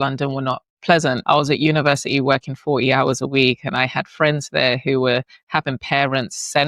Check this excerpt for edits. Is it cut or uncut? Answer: cut